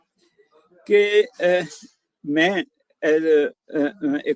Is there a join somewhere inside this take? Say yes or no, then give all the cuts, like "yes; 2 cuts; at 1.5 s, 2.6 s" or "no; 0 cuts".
no; 0 cuts